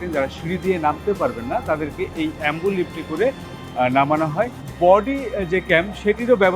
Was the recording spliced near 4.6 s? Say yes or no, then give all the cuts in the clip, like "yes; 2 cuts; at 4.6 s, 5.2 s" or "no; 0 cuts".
yes; 1 cut; at 4.6 s